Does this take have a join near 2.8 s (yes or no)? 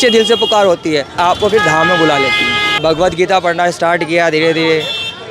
yes